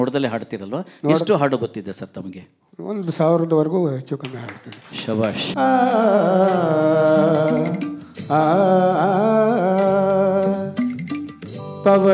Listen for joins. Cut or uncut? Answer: cut